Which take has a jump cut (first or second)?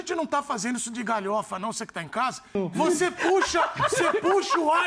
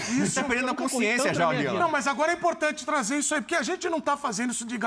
first